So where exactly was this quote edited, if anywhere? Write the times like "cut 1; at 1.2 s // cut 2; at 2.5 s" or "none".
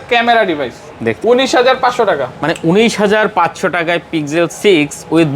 cut 1; at 1.2 s